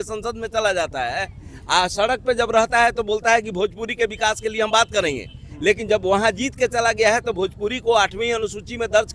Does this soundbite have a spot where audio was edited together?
no; 0 cuts

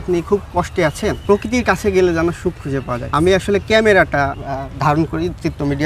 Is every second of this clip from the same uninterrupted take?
no; 3 cuts; at 1.2 s, 3.1 s, 4.4 s

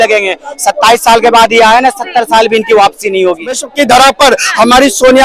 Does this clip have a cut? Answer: yes; 1 cut; at 3.7 s

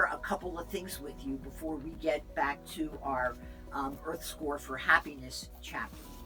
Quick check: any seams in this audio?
no; 0 cuts

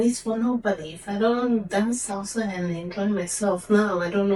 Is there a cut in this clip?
no; 0 cuts

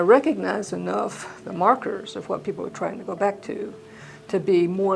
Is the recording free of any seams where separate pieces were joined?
yes; 0 cuts

